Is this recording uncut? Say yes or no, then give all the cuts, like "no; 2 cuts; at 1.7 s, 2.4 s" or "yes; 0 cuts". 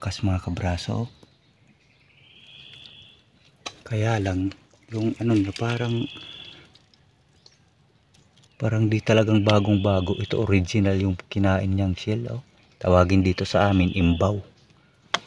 yes; 0 cuts